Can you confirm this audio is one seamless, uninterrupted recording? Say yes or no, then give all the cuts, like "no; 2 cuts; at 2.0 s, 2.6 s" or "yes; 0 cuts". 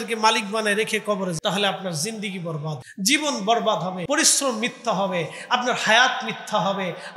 no; 3 cuts; at 1.4 s, 2.8 s, 4.0 s